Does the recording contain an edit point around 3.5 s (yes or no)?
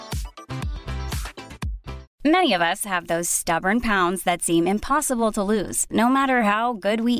no